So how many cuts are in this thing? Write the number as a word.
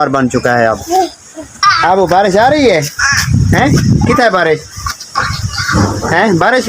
one